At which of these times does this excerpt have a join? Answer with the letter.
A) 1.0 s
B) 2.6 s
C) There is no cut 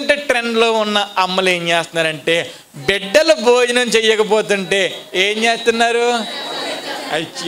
C